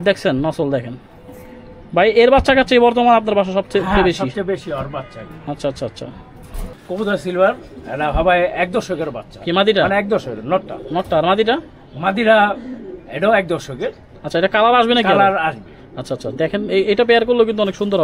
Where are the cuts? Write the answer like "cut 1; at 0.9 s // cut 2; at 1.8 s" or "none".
cut 1; at 6.7 s